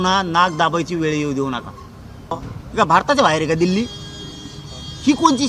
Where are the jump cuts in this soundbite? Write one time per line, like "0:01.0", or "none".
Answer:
0:02.5